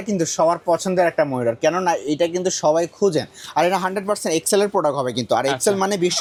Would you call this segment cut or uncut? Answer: uncut